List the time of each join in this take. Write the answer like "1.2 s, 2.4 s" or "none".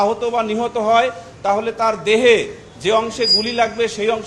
none